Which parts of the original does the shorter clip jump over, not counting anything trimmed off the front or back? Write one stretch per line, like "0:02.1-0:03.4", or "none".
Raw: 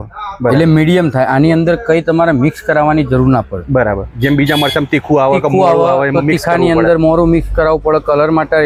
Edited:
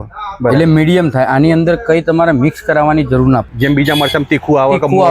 0:03.5-0:04.1